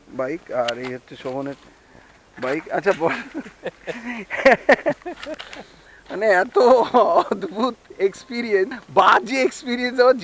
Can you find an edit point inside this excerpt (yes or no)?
yes